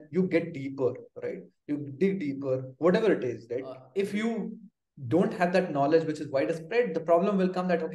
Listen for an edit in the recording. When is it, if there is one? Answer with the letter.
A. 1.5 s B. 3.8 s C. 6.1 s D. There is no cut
B